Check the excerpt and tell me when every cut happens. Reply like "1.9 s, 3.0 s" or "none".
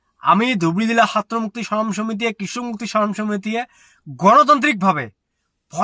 none